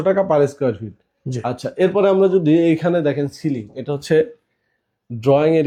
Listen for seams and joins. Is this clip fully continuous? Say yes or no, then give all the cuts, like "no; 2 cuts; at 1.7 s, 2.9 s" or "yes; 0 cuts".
yes; 0 cuts